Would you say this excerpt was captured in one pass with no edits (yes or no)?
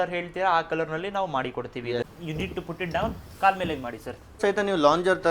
no